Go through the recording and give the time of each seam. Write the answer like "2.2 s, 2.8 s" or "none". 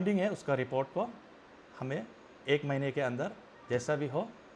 none